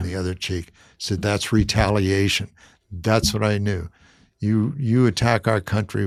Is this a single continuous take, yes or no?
yes